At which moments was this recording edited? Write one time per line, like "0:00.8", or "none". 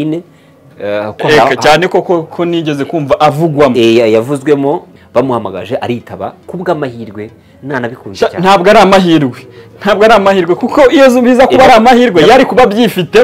0:04.9

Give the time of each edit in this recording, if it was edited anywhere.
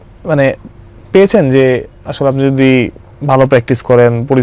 none

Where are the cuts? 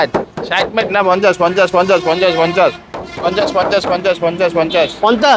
none

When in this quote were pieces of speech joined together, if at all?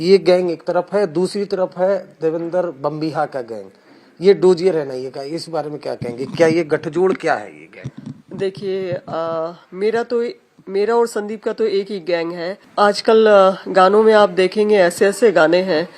0:12.6

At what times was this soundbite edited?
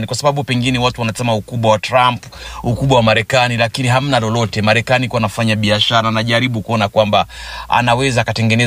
none

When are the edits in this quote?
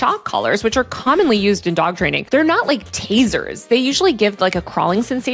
none

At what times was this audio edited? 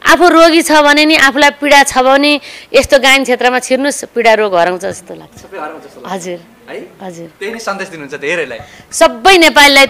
none

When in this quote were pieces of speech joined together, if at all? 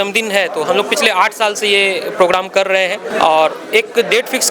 0:03.0

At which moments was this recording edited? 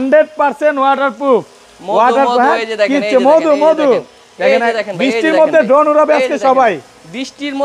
none

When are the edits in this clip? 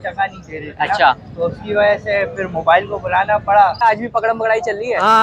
0:03.8

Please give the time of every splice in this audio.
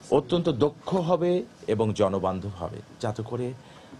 none

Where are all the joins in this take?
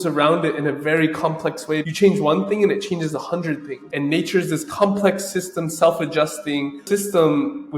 0:01.8

